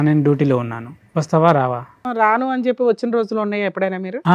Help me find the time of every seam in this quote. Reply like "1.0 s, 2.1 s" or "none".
2.0 s